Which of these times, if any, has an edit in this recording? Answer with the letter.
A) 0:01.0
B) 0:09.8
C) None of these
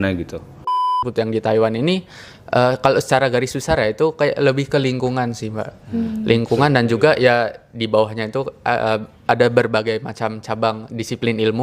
A